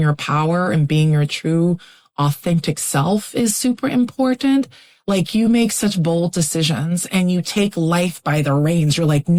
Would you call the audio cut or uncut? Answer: uncut